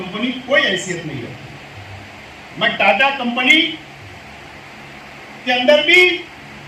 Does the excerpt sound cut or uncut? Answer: uncut